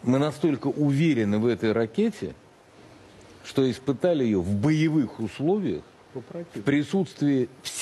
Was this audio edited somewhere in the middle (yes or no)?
no